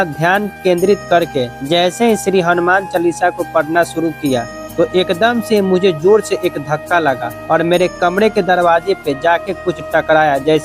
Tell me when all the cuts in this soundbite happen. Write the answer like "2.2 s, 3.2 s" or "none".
1.6 s, 4.6 s, 7.3 s